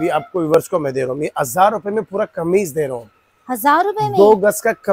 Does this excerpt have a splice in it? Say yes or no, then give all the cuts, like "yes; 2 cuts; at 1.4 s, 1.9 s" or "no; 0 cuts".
no; 0 cuts